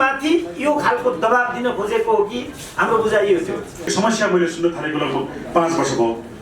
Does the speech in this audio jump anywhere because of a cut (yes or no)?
yes